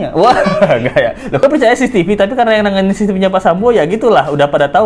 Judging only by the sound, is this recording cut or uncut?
cut